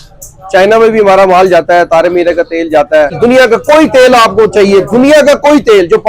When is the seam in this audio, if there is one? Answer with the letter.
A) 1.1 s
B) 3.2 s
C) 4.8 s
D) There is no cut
B